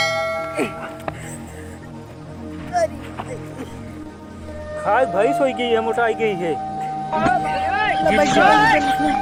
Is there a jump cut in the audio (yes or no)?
no